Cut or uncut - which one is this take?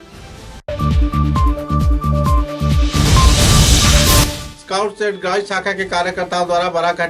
uncut